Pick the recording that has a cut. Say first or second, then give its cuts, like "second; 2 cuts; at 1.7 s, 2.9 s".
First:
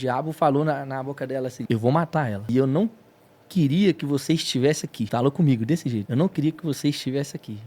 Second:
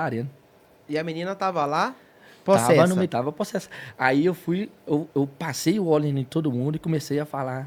first; 4 cuts; at 1.6 s, 2.5 s, 5.1 s, 6.1 s